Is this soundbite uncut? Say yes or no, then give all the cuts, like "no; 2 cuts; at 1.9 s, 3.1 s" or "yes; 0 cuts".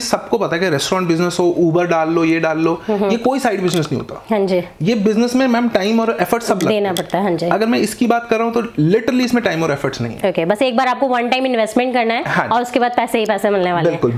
yes; 0 cuts